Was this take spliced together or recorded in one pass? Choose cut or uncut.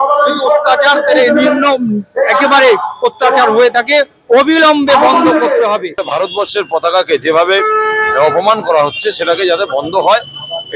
cut